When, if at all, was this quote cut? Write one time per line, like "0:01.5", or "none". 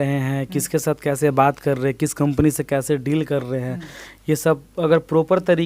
none